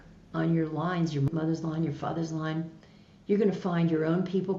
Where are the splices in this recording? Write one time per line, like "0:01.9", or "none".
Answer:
0:01.3